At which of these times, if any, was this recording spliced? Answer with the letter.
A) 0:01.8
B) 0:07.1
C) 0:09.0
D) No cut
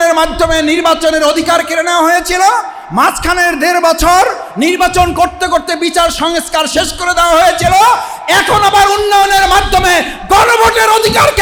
D